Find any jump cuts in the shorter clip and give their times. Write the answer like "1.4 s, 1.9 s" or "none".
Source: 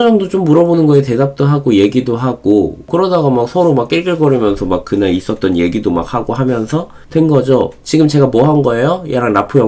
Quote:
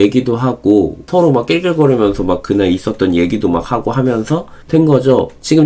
1.1 s